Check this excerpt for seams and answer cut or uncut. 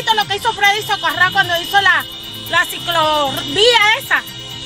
uncut